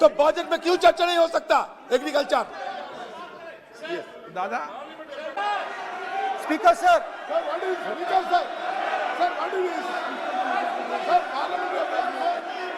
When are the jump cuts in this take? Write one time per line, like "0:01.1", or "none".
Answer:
0:05.3